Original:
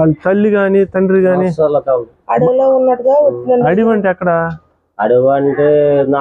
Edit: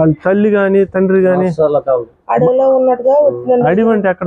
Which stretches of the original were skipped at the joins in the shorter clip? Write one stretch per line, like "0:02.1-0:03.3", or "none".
none